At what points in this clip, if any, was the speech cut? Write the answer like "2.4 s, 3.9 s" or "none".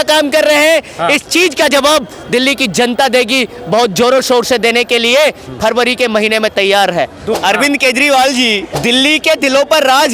7.4 s, 8.7 s

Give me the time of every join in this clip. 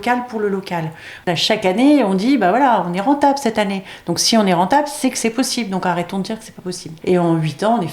1.1 s, 6.9 s

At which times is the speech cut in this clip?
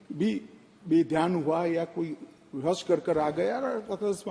none

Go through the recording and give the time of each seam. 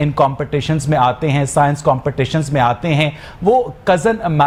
none

